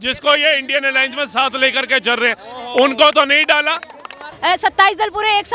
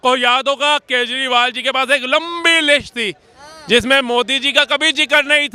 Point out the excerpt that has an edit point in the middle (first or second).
first